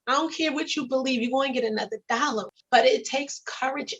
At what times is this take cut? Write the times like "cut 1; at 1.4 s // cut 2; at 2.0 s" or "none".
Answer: cut 1; at 2.5 s